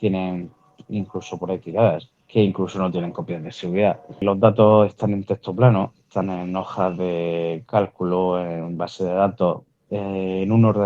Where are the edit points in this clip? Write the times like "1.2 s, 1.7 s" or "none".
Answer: 2.1 s, 4.2 s